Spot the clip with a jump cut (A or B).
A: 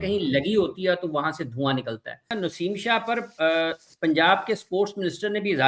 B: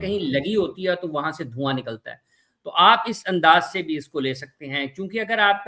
A